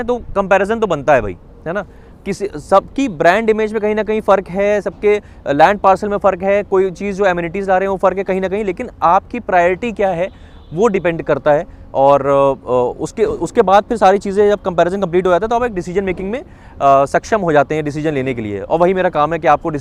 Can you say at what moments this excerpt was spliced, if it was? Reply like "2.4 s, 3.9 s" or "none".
none